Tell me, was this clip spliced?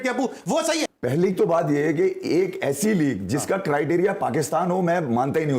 yes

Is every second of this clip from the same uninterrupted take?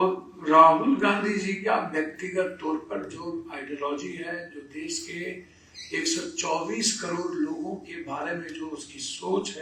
yes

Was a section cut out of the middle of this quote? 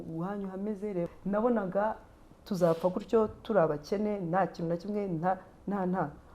yes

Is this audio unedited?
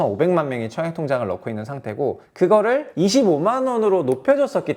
no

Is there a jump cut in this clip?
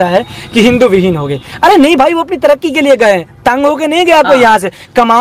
no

